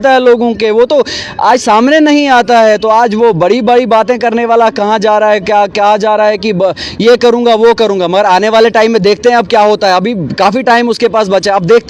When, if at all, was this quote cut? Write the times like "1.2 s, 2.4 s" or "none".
none